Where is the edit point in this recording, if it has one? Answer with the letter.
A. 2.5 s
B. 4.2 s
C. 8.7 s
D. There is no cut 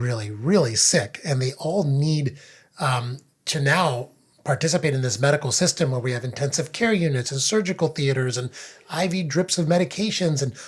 D